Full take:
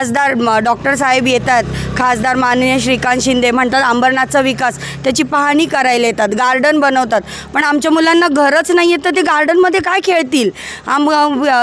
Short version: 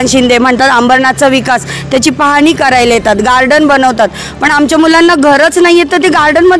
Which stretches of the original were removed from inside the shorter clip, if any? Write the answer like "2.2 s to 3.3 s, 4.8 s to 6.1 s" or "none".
none